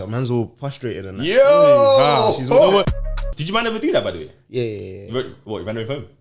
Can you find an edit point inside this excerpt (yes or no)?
yes